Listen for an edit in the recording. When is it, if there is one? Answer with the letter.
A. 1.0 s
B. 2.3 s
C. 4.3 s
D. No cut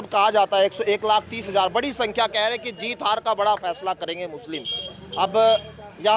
D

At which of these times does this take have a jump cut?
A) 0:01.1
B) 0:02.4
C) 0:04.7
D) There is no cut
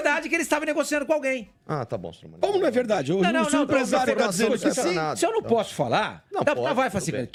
D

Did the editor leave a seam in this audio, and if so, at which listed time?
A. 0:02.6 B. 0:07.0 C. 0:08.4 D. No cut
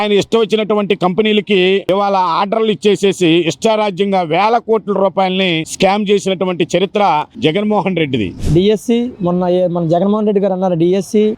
C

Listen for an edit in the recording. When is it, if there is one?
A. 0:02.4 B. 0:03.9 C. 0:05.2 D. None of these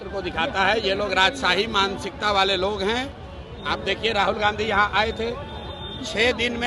D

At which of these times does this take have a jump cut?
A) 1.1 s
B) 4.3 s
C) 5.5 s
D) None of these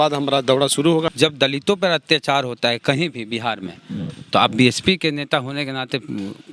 A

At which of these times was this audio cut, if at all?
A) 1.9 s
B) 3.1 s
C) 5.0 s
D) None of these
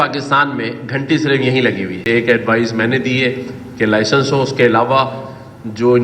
A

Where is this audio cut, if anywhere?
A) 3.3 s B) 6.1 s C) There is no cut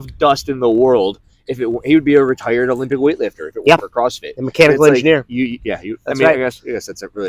C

